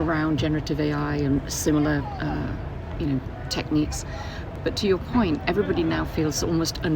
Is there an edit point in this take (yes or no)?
yes